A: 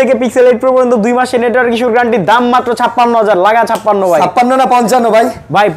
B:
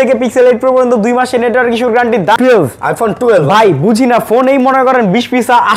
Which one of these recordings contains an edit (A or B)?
B